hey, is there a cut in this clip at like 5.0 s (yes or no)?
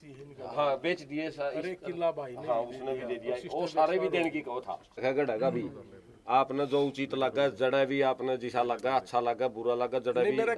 yes